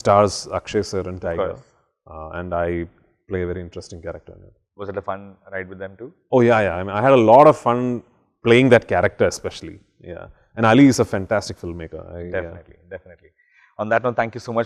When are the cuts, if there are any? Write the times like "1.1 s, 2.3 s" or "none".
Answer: none